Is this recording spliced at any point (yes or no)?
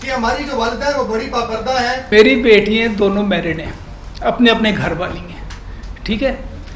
yes